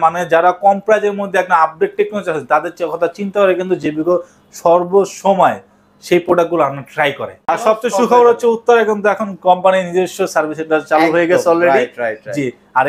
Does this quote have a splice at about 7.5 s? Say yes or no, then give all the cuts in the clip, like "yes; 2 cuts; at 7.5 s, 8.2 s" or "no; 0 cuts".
yes; 1 cut; at 7.5 s